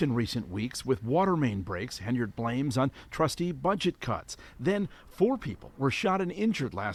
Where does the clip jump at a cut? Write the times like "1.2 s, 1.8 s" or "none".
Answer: none